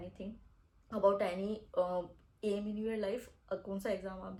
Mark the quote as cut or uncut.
uncut